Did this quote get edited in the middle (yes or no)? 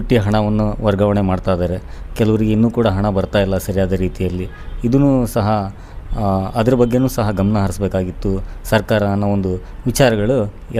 no